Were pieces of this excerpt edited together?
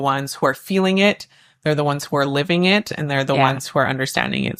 no; 0 cuts

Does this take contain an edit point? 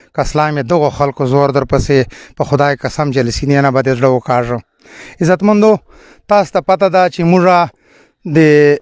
no; 0 cuts

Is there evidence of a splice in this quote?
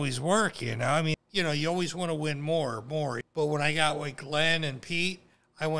yes; 2 cuts; at 1.1 s, 3.2 s

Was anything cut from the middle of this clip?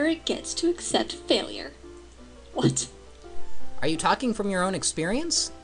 yes; 1 cut; at 1.2 s

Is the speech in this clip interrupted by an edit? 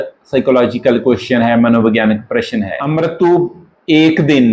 yes; 1 cut; at 2.8 s

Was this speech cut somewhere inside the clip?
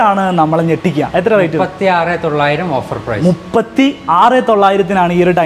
no; 0 cuts

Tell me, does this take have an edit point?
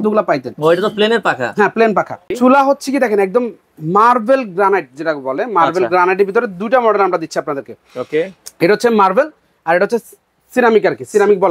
yes; 1 cut; at 2.3 s

